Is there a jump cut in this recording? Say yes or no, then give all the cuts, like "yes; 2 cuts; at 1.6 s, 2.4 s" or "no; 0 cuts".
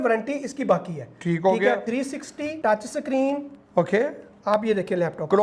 yes; 1 cut; at 2.0 s